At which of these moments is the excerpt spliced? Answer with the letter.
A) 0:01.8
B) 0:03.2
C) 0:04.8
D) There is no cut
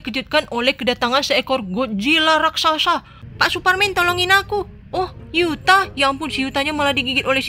B